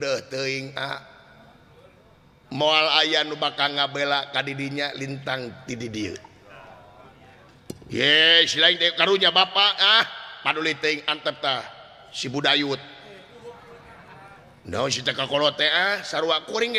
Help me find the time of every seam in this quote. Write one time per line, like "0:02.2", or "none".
none

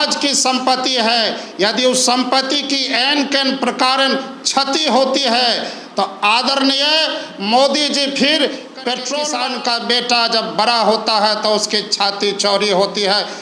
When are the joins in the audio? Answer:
0:09.3

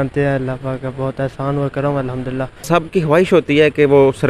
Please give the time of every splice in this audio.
0:02.7

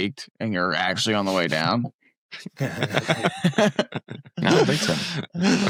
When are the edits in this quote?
none

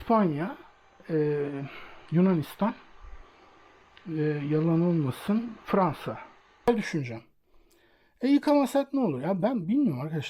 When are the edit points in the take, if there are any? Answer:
0:06.7

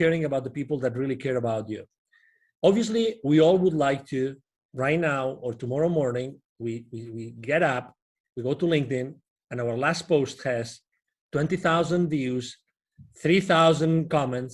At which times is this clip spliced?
none

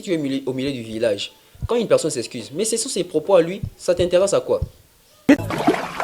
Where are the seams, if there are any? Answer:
0:05.0

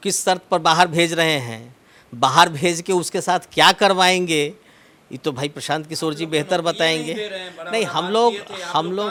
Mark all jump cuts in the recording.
none

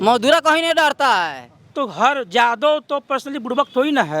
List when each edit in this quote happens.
0:01.7

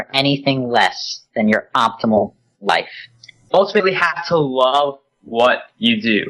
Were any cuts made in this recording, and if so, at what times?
0:03.4

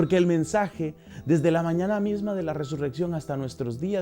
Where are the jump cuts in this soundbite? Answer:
0:01.1

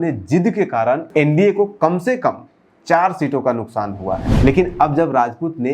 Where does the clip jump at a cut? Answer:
0:01.1
0:04.3

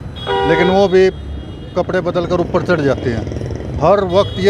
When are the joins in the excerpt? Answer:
none

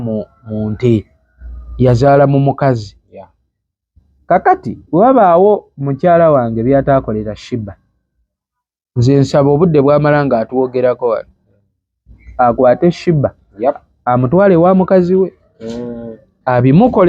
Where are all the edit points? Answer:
none

